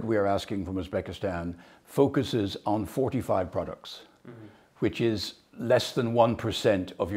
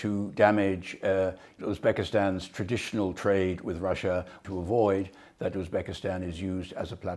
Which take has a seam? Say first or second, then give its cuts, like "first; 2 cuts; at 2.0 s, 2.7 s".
second; 1 cut; at 4.4 s